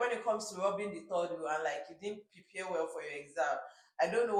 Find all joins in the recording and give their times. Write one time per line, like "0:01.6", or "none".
none